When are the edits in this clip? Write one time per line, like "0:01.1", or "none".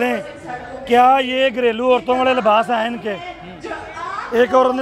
none

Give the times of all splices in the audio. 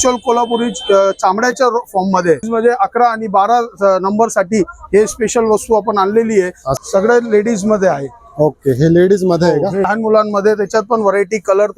0:02.5
0:06.8
0:09.9

